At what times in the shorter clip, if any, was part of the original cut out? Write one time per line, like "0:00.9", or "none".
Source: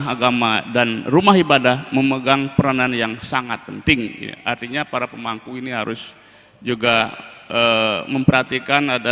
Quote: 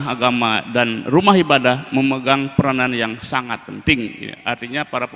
none